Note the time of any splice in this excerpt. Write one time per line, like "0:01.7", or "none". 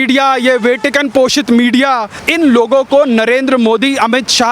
0:02.2